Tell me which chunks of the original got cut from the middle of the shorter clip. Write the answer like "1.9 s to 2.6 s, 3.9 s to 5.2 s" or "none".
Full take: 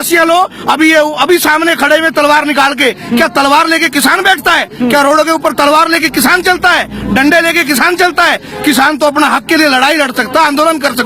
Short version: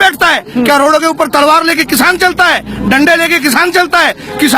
none